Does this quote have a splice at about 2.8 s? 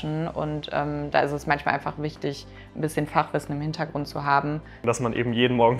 no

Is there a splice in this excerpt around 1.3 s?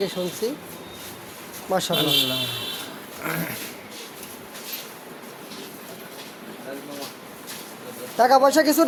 no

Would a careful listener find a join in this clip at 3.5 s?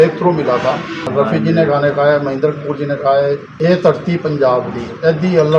yes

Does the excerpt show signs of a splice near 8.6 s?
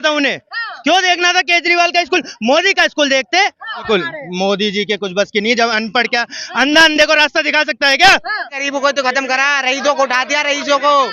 yes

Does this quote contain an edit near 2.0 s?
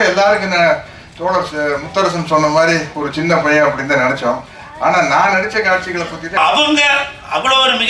no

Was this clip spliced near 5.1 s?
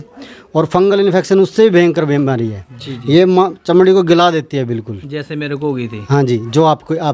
no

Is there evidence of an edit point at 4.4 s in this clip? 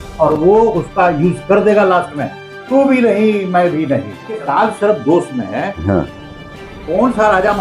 yes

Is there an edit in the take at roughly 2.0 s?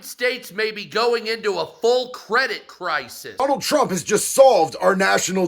no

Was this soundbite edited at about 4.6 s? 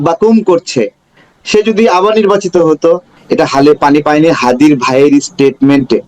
no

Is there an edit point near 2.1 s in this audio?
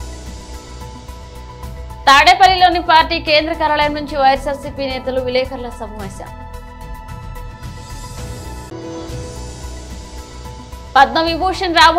yes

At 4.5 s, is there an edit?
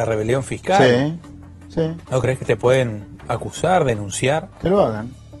yes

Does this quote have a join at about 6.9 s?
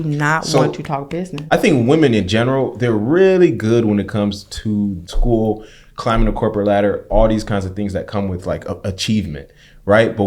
no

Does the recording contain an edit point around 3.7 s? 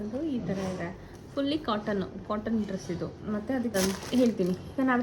yes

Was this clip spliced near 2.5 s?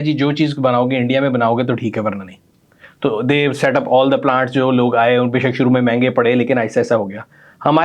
no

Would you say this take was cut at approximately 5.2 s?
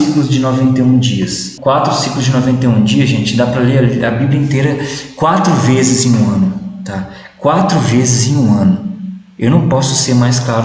no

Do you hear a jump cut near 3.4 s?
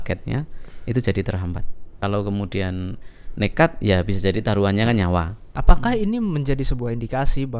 no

